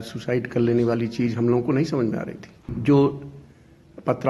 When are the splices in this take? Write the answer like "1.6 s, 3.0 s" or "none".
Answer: 2.7 s

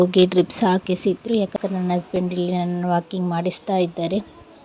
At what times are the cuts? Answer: 1.5 s

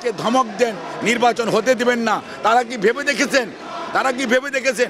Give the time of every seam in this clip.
none

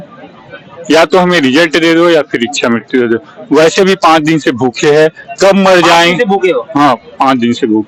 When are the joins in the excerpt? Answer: none

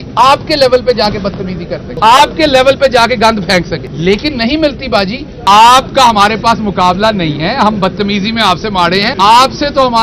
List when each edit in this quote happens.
1.9 s, 3.9 s, 5.3 s, 9.1 s

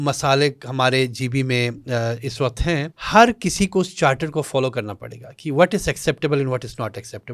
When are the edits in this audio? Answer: 3.0 s

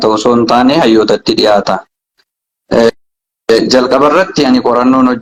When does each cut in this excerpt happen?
none

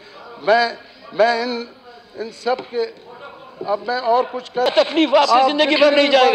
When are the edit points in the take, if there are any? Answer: 4.7 s

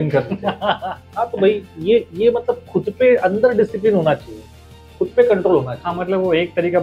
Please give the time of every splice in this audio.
none

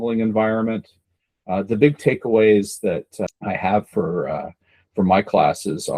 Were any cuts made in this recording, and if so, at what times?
3.3 s

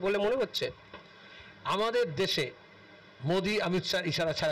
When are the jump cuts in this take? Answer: none

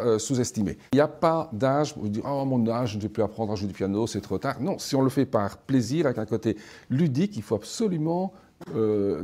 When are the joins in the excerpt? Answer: 0.9 s

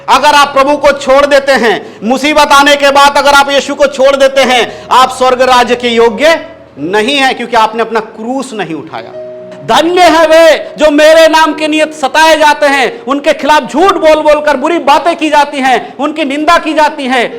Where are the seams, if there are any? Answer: 9.5 s

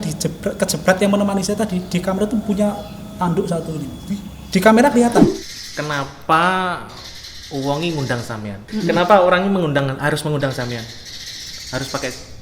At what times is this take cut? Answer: 5.2 s, 8.6 s

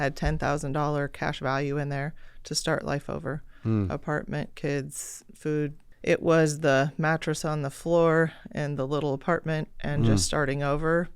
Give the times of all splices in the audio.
5.9 s

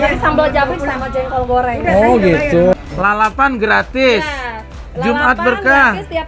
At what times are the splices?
2.7 s

